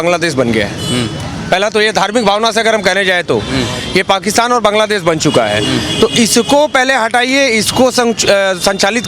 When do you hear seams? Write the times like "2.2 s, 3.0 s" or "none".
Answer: none